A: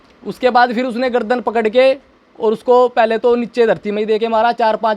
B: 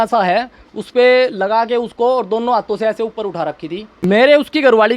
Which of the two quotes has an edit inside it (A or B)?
B